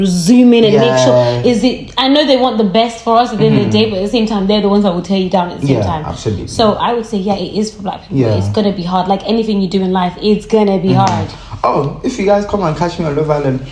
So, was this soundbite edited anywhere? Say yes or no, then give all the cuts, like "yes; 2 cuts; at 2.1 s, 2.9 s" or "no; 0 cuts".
no; 0 cuts